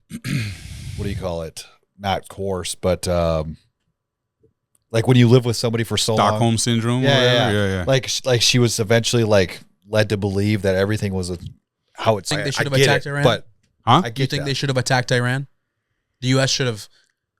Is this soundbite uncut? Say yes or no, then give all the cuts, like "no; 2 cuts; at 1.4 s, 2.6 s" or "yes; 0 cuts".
no; 1 cut; at 12.3 s